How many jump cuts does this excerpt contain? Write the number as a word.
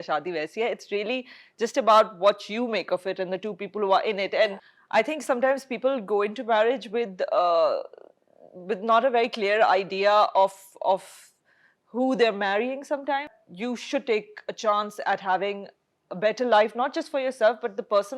two